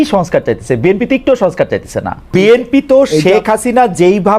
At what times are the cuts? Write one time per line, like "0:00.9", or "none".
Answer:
0:02.3